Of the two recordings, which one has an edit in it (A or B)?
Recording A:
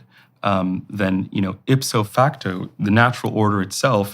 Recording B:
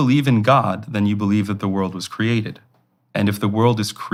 A